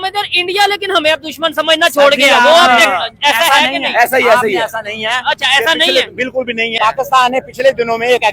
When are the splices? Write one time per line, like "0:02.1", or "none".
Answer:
0:06.8